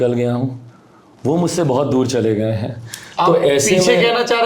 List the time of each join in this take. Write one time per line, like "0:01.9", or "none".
none